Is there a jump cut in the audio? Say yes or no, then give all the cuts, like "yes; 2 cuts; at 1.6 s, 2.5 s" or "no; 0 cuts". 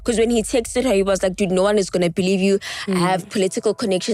no; 0 cuts